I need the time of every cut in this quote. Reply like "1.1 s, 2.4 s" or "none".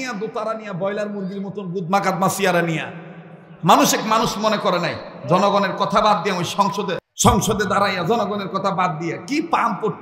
7.0 s